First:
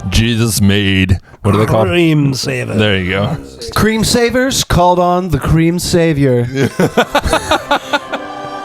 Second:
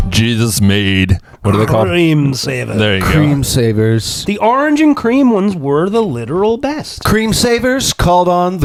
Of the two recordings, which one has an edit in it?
first; 1 cut; at 3.4 s

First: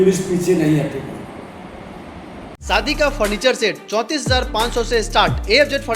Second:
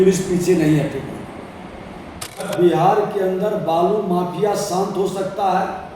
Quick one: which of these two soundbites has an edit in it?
second; 1 cut; at 2.5 s

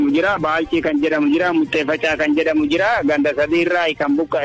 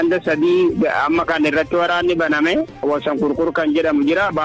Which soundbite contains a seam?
second; 1 cut; at 2.8 s

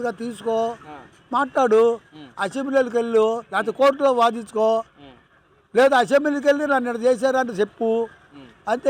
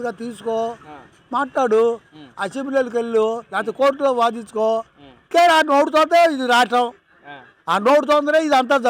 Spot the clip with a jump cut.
second; 1 cut; at 5.2 s

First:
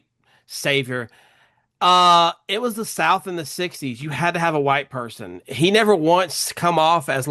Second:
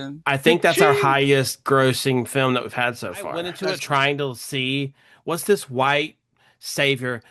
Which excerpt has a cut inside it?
second; 1 cut; at 3.5 s

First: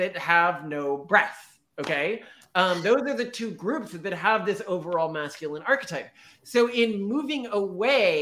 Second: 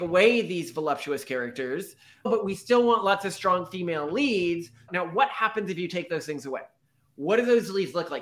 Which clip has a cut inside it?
second; 2 cuts; at 2.3 s, 4.9 s

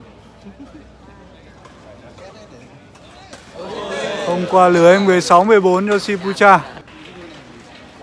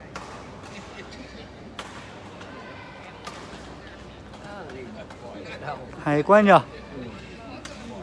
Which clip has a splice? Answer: first; 1 cut; at 6.8 s

